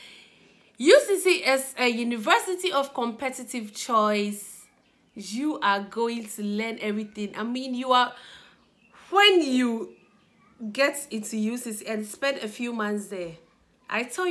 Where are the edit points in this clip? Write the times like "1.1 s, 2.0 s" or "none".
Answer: none